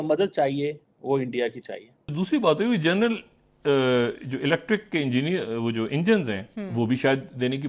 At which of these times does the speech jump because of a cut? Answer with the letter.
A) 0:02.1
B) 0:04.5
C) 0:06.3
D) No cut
A